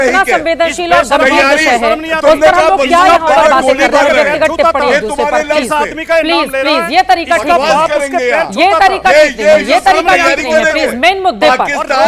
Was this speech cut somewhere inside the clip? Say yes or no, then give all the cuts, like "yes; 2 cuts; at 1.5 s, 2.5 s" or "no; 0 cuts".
no; 0 cuts